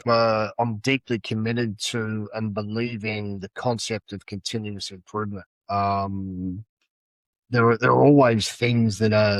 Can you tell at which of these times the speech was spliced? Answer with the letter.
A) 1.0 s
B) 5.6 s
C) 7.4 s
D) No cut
D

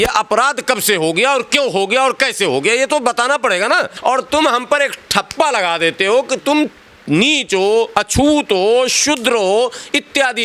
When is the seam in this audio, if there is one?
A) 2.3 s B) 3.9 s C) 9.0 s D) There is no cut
B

